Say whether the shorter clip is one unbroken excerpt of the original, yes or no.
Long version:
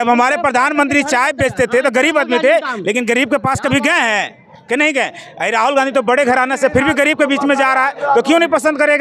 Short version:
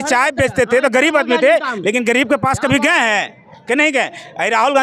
yes